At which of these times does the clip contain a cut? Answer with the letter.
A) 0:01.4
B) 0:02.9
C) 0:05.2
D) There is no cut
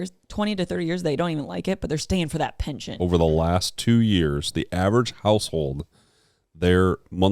B